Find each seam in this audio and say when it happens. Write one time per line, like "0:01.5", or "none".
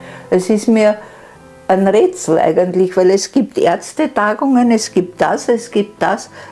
none